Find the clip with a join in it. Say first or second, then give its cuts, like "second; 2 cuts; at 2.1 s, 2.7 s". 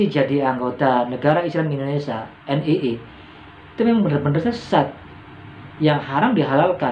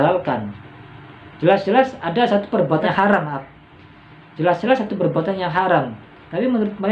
second; 1 cut; at 2.8 s